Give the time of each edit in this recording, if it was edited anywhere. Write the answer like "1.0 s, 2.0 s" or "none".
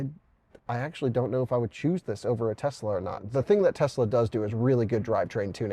3.2 s